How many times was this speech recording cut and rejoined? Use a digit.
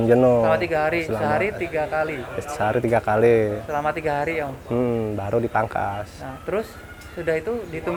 0